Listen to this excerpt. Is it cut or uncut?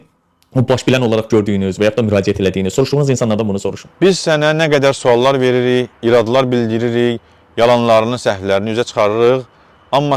uncut